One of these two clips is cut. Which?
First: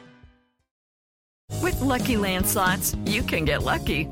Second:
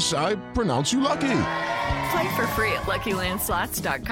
first; 1 cut; at 1.1 s

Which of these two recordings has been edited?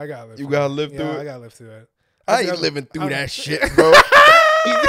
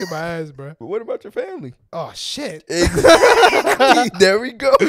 second; 2 cuts; at 0.8 s, 1.8 s

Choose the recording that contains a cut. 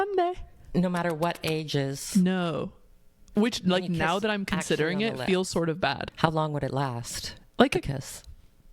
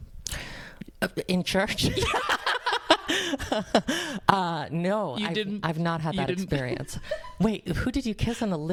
first; 1 cut; at 6.1 s

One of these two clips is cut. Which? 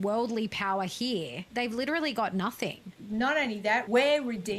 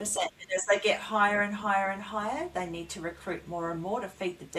first; 3 cuts; at 1.4 s, 3.0 s, 3.9 s

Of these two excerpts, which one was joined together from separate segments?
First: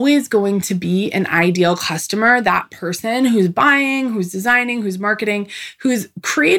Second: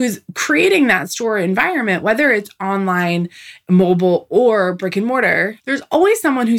second; 1 cut; at 5.6 s

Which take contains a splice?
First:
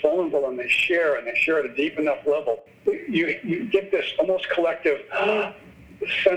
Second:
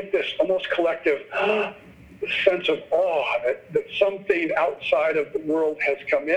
first; 1 cut; at 2.7 s

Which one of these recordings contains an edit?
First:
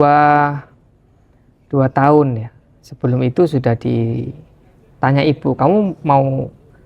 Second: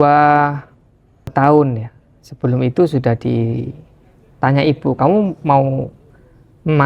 second; 1 cut; at 1.3 s

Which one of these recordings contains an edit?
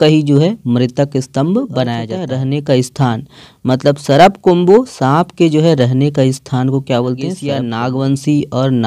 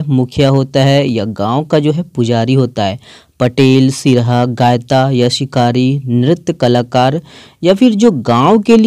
first; 2 cuts; at 2.1 s, 7.5 s

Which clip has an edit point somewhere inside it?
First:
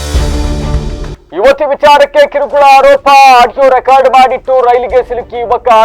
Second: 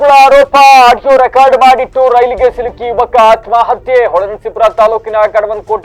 first; 1 cut; at 1.1 s

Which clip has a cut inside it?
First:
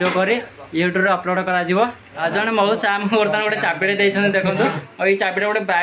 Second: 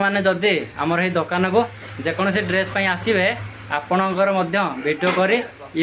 first; 1 cut; at 2.2 s

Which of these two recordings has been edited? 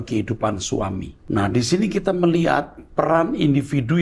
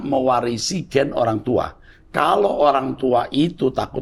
first; 1 cut; at 1.1 s

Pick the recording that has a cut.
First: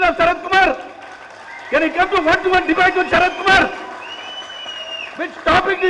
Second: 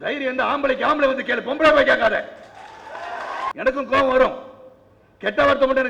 second; 1 cut; at 3.5 s

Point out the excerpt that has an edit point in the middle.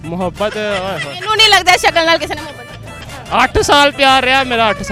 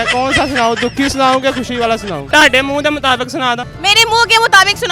second; 2 cuts; at 2.3 s, 3.7 s

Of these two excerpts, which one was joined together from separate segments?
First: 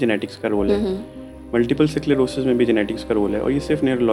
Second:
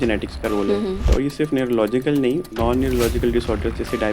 second; 2 cuts; at 1.1 s, 2.5 s

